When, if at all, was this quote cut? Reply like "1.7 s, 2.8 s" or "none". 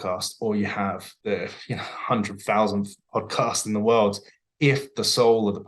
1.1 s